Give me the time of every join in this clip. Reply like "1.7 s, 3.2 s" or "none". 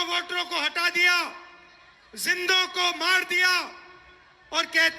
none